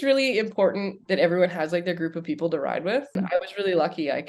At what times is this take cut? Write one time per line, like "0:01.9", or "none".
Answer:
0:03.2